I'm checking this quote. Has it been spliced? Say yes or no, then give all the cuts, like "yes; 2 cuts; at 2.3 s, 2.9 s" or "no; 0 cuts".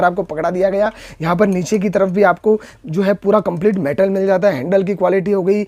no; 0 cuts